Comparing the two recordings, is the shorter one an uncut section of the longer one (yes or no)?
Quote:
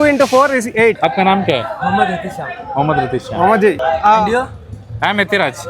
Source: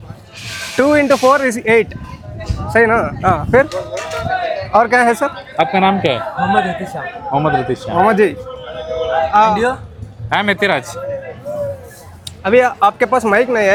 no